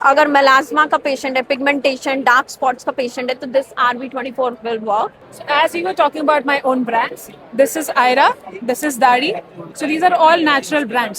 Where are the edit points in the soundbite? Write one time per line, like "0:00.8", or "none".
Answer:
0:05.3